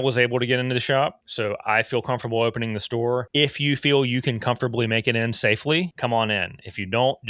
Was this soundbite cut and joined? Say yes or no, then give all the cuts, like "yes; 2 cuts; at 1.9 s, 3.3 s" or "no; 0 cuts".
yes; 3 cuts; at 1.2 s, 3.3 s, 5.9 s